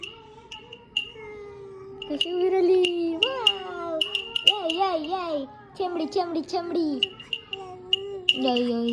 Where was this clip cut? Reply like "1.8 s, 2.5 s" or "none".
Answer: none